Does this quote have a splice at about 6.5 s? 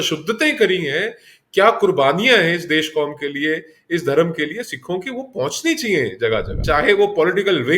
yes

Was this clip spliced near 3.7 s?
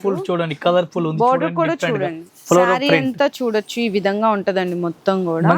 no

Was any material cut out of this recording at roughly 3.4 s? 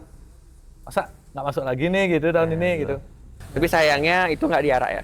yes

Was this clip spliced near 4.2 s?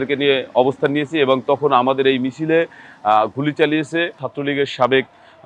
yes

